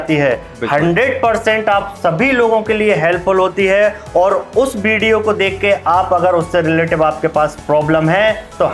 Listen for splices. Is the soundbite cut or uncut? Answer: cut